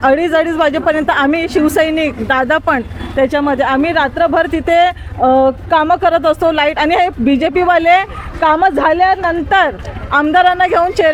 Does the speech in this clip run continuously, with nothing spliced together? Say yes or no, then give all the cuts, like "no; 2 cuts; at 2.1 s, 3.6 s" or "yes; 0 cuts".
yes; 0 cuts